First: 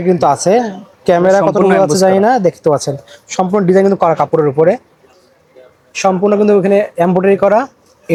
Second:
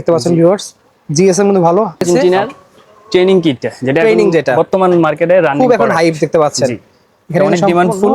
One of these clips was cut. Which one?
second; 1 cut; at 2.0 s

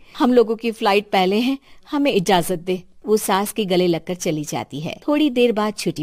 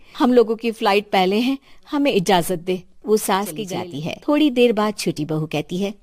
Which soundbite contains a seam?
second; 1 cut; at 3.6 s

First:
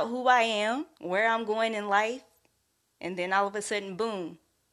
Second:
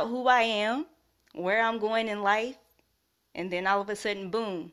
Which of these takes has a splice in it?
first; 1 cut; at 0.9 s

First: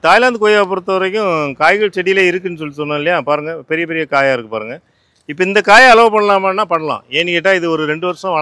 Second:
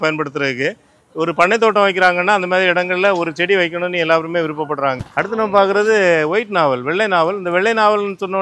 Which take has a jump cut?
second; 1 cut; at 5.0 s

